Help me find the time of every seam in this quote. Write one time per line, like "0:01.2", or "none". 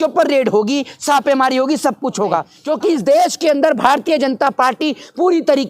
0:02.5